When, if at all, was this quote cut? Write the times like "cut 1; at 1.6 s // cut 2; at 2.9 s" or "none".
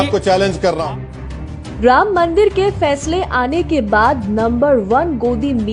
none